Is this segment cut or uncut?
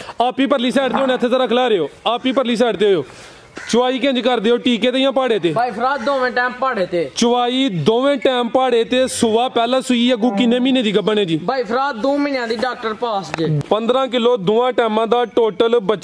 cut